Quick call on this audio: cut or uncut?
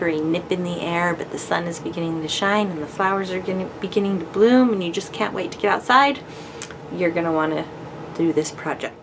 uncut